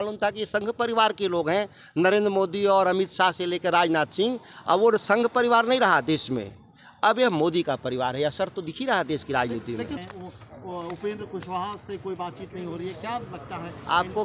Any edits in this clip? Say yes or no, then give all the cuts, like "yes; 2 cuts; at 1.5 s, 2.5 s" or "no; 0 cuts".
no; 0 cuts